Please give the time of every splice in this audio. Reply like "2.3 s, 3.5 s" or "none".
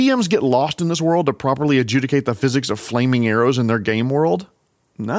none